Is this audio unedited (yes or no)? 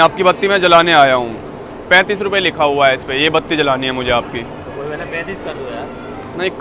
yes